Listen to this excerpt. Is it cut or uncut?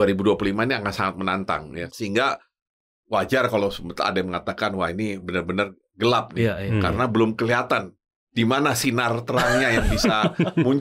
uncut